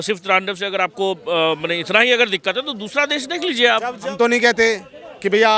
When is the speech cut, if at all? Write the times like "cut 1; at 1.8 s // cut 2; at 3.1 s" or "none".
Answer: cut 1; at 4.1 s